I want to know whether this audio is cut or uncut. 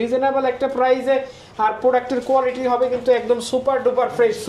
uncut